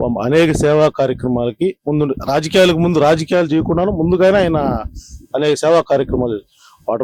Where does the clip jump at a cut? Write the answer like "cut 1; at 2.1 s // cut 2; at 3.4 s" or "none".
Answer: none